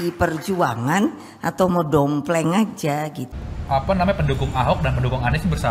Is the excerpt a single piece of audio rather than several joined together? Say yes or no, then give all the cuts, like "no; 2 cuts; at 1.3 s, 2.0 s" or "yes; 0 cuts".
no; 1 cut; at 3.2 s